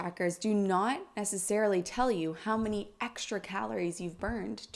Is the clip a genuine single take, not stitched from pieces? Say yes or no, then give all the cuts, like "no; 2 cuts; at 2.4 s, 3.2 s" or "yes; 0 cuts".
yes; 0 cuts